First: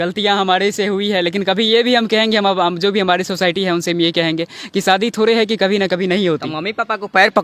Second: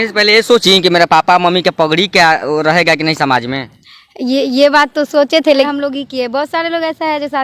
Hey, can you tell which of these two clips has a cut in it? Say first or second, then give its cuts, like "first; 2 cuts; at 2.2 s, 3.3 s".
second; 1 cut; at 5.7 s